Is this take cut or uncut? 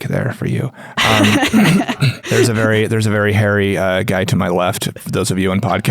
cut